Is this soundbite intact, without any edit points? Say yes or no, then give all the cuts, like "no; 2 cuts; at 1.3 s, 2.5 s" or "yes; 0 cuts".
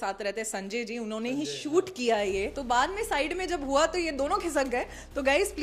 no; 1 cut; at 2.6 s